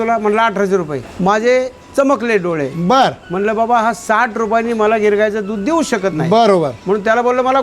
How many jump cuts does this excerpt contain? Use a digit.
1